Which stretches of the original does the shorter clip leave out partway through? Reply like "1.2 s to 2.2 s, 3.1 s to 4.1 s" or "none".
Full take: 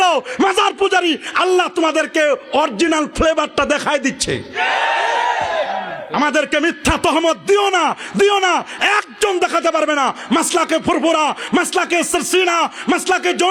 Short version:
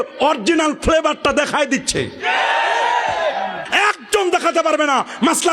6.0 s to 8.7 s